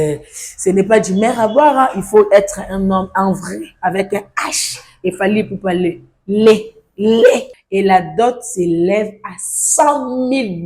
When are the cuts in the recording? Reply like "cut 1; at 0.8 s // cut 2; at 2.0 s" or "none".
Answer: cut 1; at 7.6 s